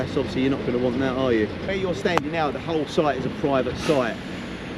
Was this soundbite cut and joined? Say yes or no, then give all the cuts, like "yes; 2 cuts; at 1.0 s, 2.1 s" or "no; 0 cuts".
yes; 1 cut; at 1.7 s